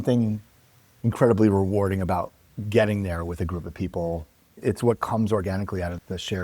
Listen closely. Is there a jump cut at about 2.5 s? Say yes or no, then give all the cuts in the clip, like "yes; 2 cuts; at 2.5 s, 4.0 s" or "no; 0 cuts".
no; 1 cut; at 4.5 s